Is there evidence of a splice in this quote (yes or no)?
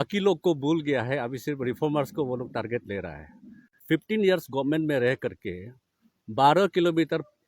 yes